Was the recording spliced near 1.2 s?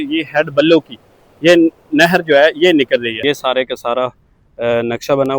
no; 1 cut; at 3.1 s

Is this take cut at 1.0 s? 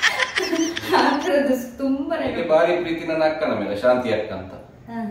no; 1 cut; at 2.3 s

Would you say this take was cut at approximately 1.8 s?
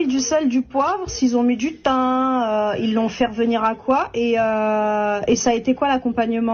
no; 0 cuts

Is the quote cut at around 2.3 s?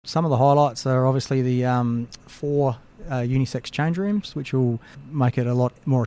no; 0 cuts

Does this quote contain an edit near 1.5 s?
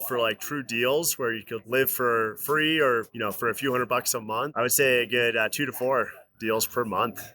yes; 3 cuts; at 1.5 s, 3.1 s, 4.5 s

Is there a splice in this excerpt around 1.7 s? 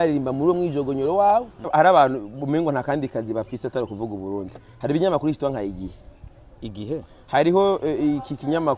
yes; 1 cut; at 1.7 s

